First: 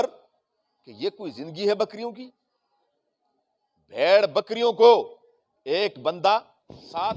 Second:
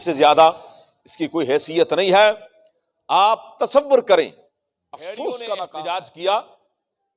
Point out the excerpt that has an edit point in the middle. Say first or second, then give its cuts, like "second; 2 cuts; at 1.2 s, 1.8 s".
second; 1 cut; at 5.7 s